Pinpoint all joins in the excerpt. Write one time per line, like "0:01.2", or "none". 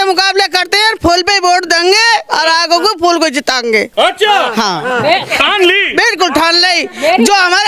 none

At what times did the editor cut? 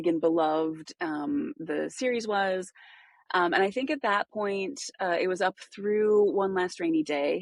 none

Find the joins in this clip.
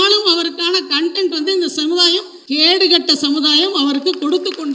0:02.3

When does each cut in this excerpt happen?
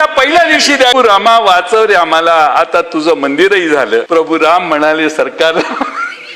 0:00.9
0:04.1

